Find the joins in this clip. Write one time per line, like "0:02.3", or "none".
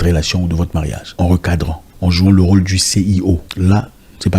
0:01.0
0:01.8
0:03.5

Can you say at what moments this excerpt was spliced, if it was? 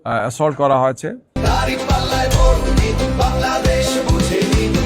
none

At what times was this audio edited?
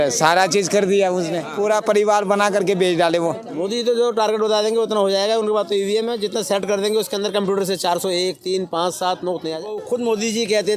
0:01.5
0:03.5
0:09.8

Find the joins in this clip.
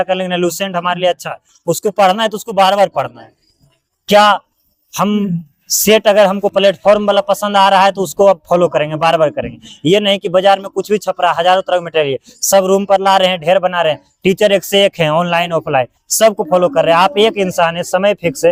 none

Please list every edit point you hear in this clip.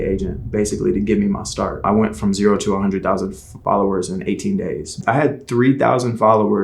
0:01.8
0:05.0

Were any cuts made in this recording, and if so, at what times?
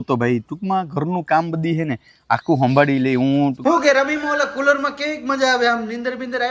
0:03.6

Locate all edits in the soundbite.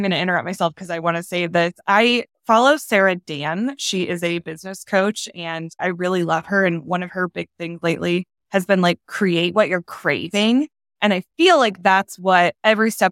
none

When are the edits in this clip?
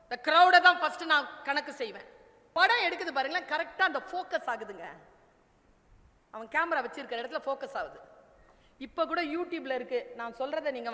0:02.5

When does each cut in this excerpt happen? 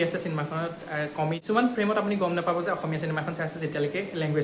0:01.4

